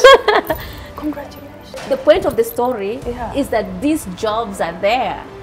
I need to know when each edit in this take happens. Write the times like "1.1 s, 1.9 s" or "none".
1.8 s